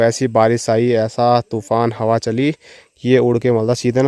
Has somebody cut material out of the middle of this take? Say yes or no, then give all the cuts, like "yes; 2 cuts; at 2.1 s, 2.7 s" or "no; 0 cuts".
no; 0 cuts